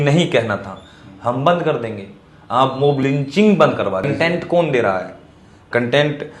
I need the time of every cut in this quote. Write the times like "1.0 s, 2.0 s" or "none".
4.1 s